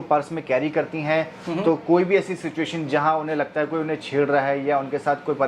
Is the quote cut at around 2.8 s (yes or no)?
no